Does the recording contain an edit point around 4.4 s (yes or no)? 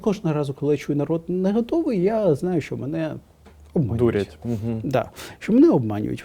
no